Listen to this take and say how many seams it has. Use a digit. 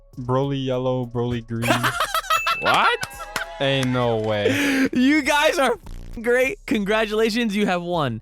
0